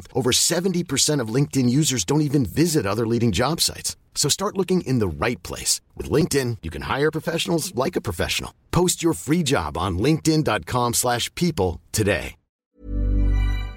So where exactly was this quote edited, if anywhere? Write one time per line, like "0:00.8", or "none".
0:12.6